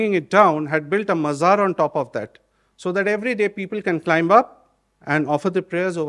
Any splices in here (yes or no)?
no